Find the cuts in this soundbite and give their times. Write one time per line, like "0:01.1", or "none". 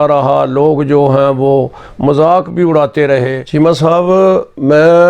0:03.4